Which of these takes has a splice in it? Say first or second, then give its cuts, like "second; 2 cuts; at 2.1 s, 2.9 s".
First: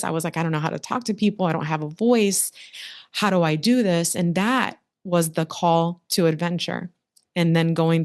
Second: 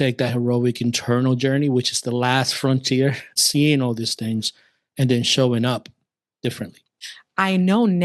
second; 2 cuts; at 3.4 s, 6.9 s